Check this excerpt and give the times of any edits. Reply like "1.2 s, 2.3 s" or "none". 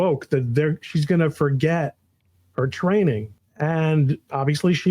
3.4 s